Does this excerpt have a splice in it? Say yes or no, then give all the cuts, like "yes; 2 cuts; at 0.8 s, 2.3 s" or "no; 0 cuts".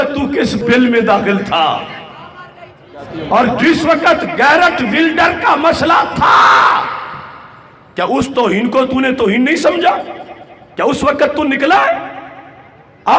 no; 0 cuts